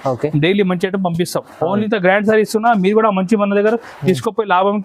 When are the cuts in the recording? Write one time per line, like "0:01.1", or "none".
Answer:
0:01.9